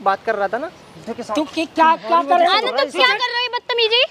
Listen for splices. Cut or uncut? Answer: cut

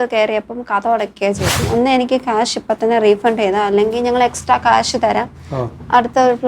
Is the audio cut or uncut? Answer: cut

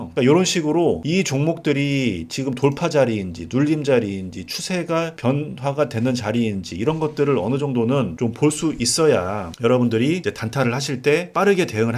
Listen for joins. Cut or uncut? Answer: uncut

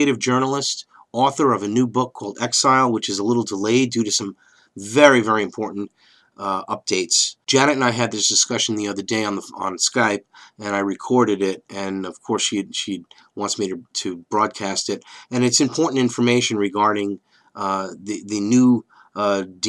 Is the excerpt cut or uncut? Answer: cut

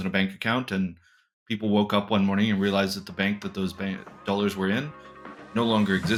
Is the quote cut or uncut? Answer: uncut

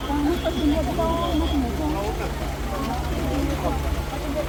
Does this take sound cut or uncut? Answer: uncut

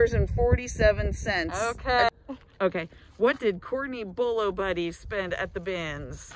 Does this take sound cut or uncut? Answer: cut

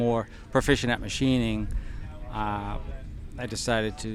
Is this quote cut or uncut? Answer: uncut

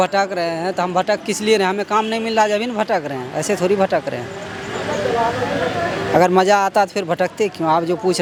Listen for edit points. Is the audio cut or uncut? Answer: uncut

